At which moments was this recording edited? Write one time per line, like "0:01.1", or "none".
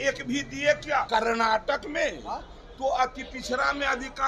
0:01.1